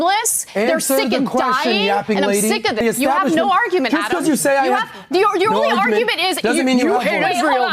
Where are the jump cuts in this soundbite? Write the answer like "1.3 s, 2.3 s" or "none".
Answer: 2.8 s